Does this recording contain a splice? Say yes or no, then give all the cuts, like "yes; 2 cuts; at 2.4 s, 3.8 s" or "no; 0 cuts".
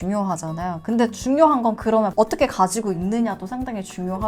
yes; 1 cut; at 2.1 s